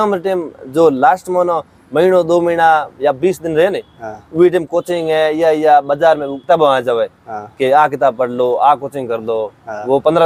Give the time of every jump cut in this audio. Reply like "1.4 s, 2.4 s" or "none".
none